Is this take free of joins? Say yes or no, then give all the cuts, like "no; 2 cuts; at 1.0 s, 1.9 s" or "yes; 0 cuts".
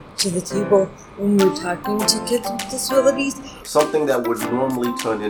no; 1 cut; at 3.6 s